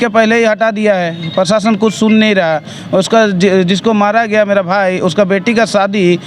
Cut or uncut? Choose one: uncut